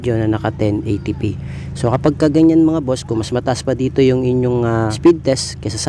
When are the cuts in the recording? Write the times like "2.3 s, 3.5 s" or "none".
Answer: 5.0 s